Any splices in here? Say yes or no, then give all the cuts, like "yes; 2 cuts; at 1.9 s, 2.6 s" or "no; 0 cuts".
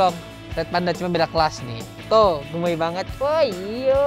no; 0 cuts